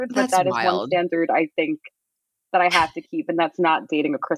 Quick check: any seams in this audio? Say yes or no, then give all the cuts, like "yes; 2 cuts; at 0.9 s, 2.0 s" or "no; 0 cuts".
no; 0 cuts